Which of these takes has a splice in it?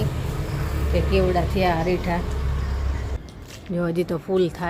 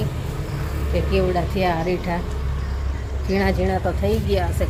first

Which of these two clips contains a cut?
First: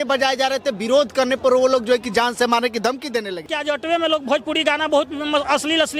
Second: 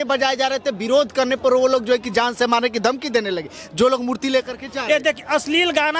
first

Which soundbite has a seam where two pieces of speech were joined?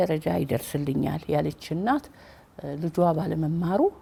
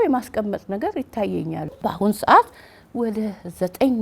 second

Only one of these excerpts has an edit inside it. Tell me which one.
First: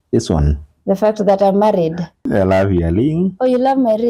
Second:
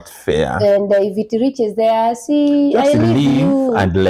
first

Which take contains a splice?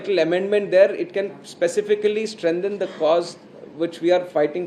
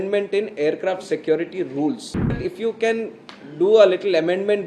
second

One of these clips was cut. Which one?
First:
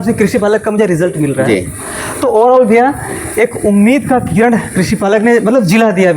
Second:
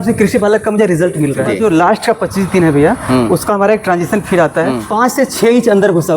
second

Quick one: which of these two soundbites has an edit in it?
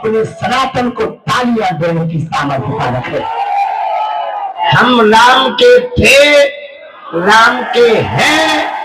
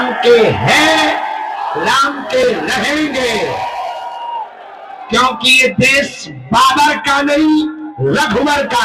first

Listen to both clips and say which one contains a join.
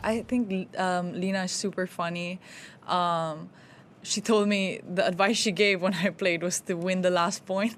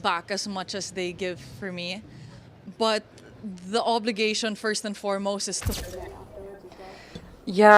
second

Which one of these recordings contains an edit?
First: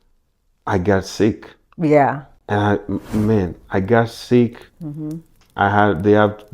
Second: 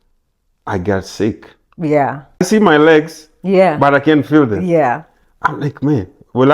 second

